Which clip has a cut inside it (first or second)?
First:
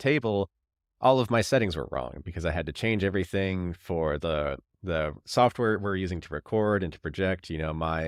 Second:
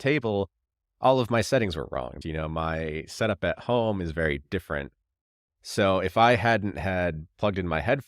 second